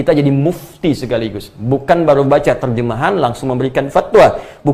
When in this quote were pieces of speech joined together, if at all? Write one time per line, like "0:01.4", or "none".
none